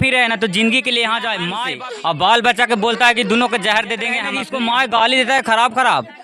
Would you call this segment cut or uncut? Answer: cut